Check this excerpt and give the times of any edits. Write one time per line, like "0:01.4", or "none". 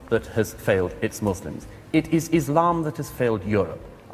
none